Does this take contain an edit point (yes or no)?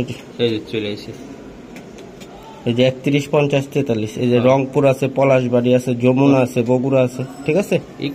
no